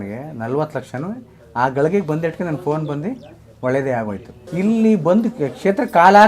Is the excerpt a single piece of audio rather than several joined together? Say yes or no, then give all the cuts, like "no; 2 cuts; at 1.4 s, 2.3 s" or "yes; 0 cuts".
no; 1 cut; at 4.3 s